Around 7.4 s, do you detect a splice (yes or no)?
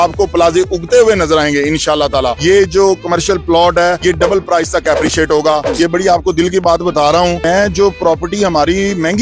yes